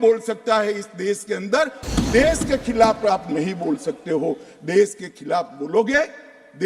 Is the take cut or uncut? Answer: cut